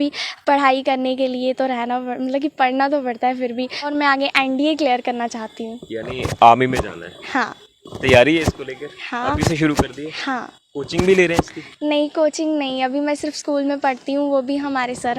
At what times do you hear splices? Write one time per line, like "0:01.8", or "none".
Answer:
0:03.9